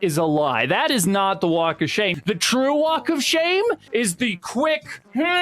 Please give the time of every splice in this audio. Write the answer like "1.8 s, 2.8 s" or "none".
2.1 s, 3.8 s